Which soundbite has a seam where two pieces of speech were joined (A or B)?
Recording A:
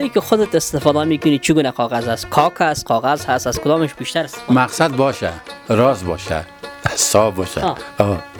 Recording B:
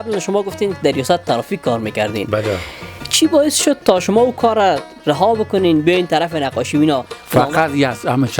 B